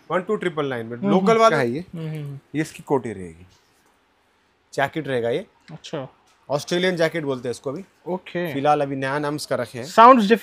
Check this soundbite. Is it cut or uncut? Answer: cut